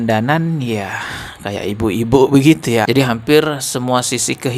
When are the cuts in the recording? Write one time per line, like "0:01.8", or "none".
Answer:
0:02.9